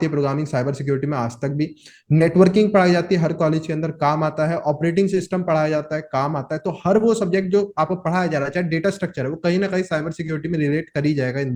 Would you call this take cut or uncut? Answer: uncut